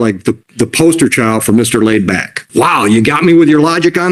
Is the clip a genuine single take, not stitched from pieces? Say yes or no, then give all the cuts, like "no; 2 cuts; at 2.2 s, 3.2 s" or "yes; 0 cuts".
no; 1 cut; at 2.4 s